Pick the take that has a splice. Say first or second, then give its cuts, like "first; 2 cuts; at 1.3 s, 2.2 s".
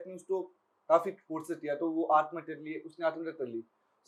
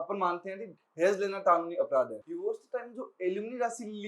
second; 1 cut; at 2.2 s